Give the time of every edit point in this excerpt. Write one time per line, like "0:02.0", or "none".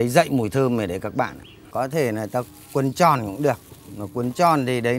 0:01.6

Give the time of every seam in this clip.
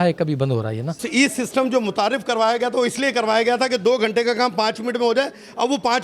none

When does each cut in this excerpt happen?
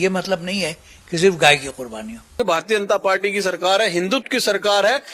0:02.3

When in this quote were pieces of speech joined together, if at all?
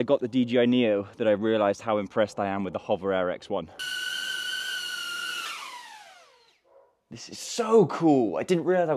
0:03.8

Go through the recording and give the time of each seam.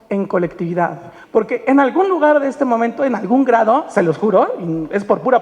0:01.1

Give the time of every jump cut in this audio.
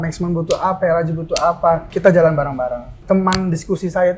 0:01.9
0:02.9

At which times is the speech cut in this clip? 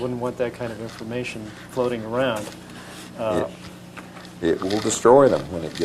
0:02.5

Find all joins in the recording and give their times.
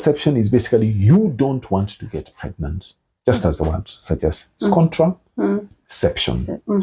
none

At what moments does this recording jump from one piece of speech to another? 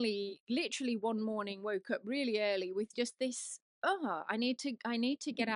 none

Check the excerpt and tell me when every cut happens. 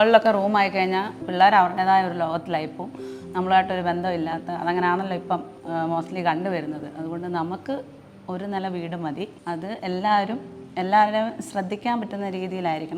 0:01.2
0:05.6
0:09.4

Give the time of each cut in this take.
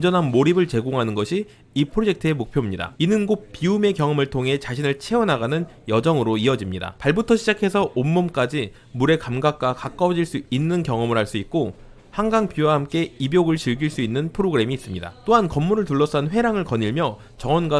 none

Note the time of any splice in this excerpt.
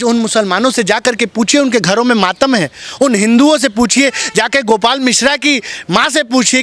none

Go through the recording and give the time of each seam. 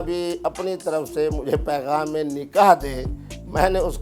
none

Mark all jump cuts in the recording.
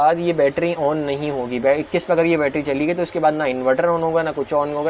none

